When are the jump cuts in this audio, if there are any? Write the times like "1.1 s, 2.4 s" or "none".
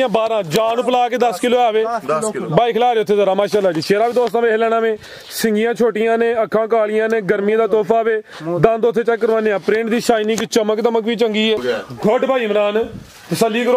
11.6 s